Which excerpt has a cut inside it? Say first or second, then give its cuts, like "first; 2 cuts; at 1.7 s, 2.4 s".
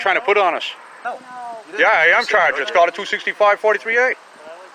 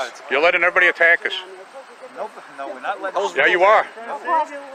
first; 1 cut; at 1.0 s